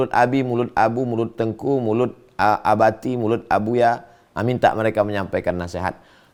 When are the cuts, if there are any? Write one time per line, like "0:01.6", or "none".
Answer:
none